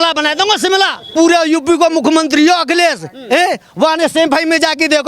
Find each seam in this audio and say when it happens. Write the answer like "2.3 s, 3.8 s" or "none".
1.1 s